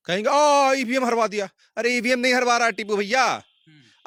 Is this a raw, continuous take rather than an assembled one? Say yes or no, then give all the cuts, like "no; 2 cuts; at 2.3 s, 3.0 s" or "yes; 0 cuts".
yes; 0 cuts